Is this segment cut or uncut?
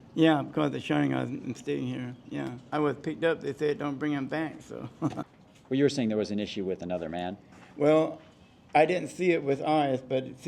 cut